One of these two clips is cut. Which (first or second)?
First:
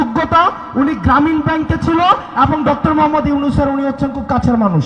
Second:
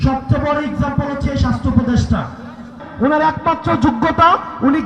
second